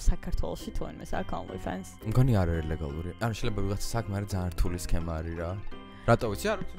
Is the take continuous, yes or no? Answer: yes